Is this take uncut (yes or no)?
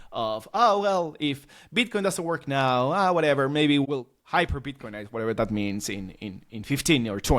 no